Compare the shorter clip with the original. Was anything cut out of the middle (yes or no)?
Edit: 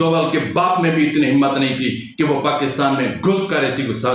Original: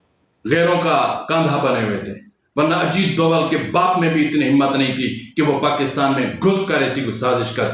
no